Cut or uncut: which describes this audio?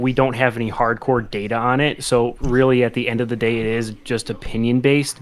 uncut